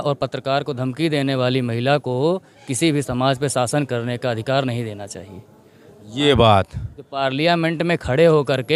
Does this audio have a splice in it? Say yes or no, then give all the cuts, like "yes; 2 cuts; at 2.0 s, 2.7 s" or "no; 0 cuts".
no; 0 cuts